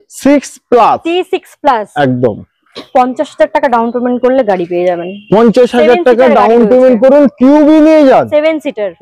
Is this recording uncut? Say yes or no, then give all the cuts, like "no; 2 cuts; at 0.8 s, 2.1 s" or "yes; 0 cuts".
yes; 0 cuts